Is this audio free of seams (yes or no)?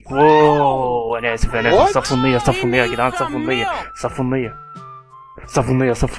yes